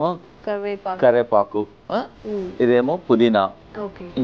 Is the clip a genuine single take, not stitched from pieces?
yes; 0 cuts

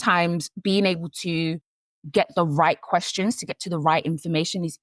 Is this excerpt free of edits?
yes; 0 cuts

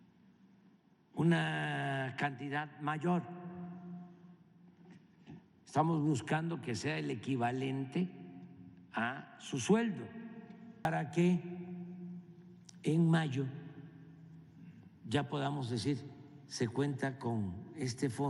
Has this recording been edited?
yes; 1 cut; at 10.8 s

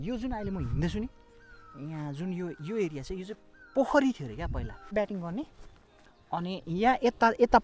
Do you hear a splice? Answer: yes; 1 cut; at 4.9 s

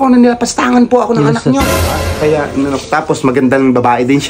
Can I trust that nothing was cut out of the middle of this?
no; 1 cut; at 1.8 s

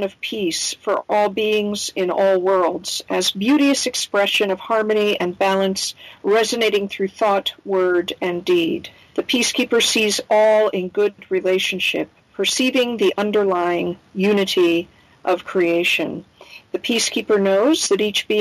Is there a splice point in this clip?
yes; 2 cuts; at 1.0 s, 11.2 s

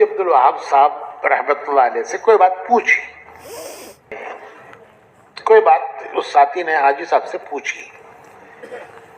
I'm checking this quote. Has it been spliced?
yes; 1 cut; at 4.1 s

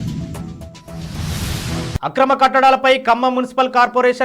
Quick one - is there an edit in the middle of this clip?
yes; 1 cut; at 1.9 s

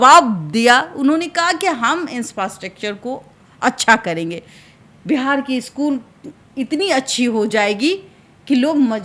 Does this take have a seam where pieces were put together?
no; 0 cuts

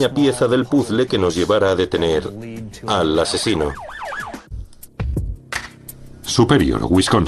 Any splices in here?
no; 0 cuts

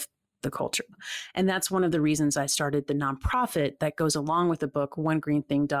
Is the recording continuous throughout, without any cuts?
no; 1 cut; at 1.0 s

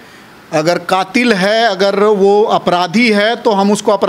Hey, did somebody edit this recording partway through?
no; 0 cuts

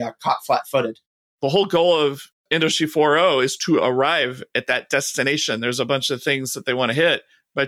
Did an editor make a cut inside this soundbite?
yes; 1 cut; at 1.0 s

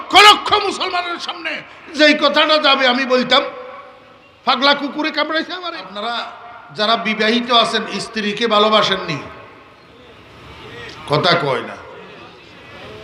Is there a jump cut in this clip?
yes; 1 cut; at 5.9 s

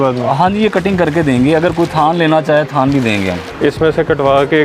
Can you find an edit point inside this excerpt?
yes; 1 cut; at 3.4 s

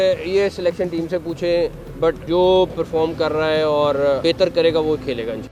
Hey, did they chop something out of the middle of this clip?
no; 0 cuts

